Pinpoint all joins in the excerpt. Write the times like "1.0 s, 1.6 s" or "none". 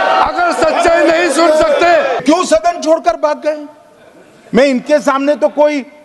2.2 s